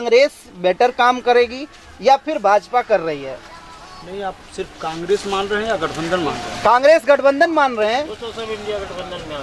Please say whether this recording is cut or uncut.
uncut